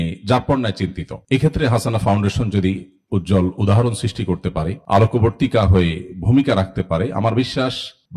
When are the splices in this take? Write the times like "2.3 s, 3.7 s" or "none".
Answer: none